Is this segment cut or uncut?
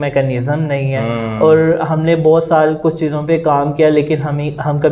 uncut